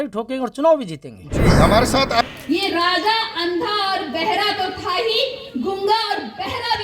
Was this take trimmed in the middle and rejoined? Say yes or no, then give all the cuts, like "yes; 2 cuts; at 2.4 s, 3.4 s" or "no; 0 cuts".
yes; 1 cut; at 2.4 s